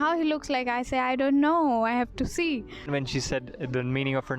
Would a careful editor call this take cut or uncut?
cut